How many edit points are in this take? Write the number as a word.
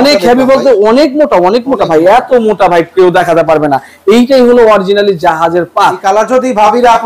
one